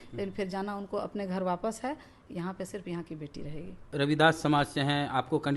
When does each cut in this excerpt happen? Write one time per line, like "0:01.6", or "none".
0:03.9

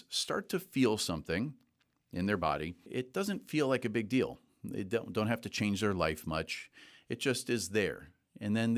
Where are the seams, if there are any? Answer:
0:02.8

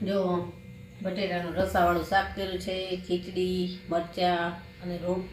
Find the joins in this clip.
none

